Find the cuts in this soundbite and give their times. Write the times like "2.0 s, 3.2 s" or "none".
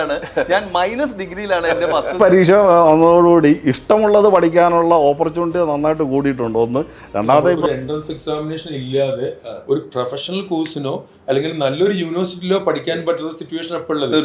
2.2 s, 7.6 s